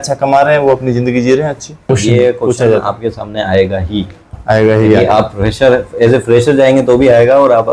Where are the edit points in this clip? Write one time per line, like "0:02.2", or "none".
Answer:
0:01.9